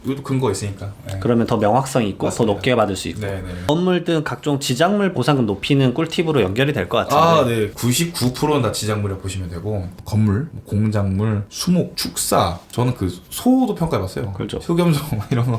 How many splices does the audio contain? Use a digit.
2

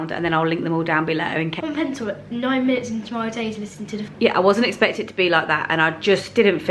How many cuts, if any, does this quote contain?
2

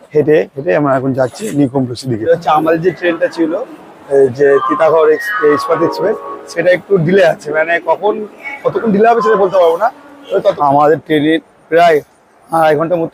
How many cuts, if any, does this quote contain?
2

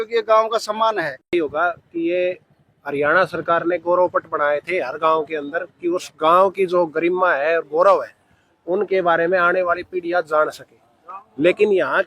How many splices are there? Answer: 1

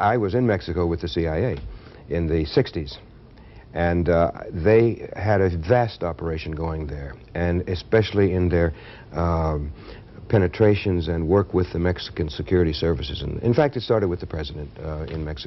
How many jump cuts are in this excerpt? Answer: 0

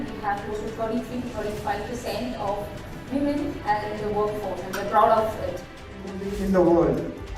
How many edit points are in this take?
1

